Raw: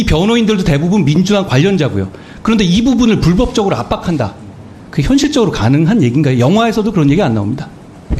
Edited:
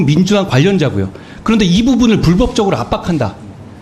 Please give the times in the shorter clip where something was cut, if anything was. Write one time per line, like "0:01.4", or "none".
none